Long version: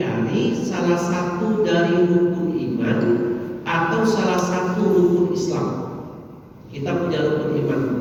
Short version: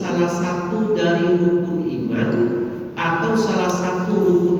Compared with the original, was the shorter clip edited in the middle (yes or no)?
no